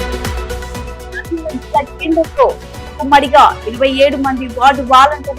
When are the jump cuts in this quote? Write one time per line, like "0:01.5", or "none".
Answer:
0:01.2